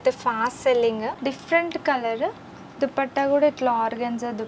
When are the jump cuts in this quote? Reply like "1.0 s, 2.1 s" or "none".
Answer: 1.1 s